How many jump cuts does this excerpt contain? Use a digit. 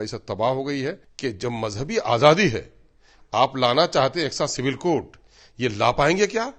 1